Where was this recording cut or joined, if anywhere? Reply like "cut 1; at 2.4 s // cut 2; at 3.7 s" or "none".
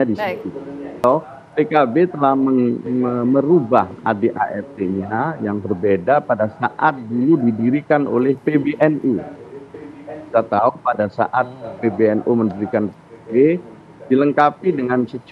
cut 1; at 1.0 s